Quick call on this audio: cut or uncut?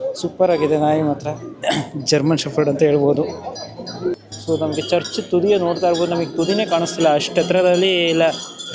cut